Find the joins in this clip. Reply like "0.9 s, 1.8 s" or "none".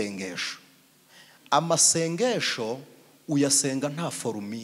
none

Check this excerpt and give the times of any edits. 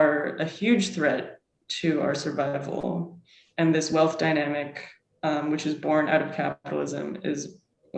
none

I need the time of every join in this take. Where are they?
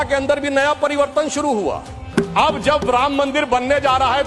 2.0 s

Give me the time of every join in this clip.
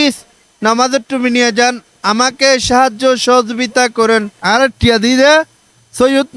4.3 s

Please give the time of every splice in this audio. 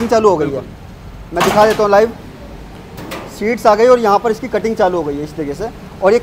none

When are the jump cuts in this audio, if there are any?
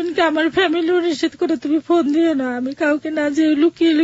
none

